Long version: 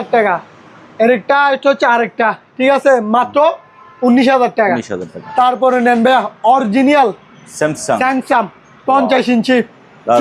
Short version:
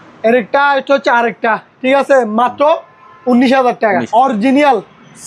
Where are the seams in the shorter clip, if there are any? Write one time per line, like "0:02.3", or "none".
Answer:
0:04.1